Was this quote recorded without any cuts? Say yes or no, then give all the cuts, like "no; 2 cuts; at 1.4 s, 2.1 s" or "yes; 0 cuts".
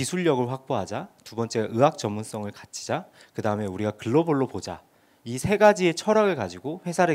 yes; 0 cuts